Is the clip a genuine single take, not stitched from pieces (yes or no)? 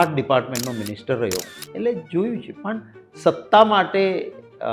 no